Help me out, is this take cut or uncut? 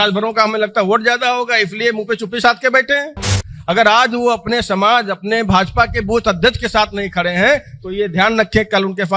uncut